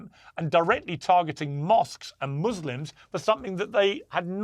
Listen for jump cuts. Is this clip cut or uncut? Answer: uncut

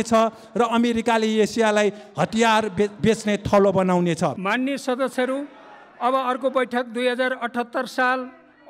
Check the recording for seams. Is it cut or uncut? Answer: cut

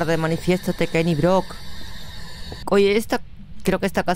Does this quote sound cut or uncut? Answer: cut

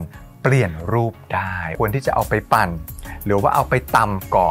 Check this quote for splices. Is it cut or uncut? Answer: cut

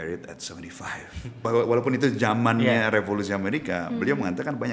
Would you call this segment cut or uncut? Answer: cut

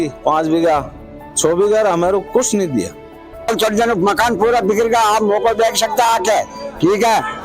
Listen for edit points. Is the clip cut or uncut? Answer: cut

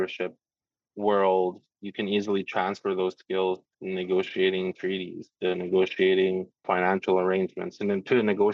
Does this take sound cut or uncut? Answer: cut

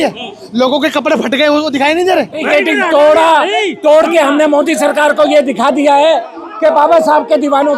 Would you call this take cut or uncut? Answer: cut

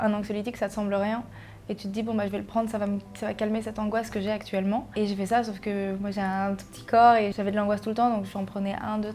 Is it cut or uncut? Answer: cut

